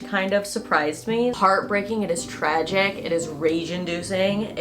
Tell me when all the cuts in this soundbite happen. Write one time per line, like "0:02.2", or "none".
0:01.4